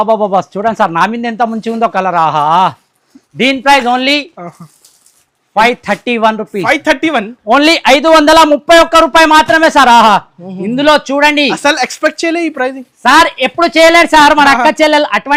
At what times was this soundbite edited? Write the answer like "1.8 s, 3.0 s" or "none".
none